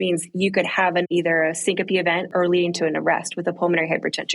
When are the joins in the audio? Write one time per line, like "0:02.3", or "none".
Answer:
0:01.1
0:02.3